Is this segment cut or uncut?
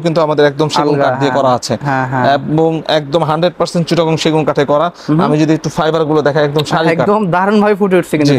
uncut